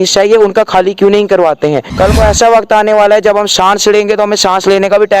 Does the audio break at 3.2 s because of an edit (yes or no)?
no